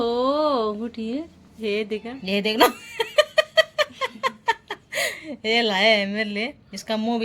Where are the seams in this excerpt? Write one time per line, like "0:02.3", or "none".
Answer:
0:02.2